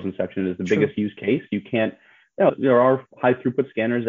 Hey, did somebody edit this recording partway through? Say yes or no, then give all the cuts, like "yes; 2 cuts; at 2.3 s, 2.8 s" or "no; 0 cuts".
yes; 1 cut; at 2.5 s